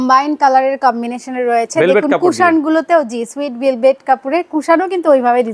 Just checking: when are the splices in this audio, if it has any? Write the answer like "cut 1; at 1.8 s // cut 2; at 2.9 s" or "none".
none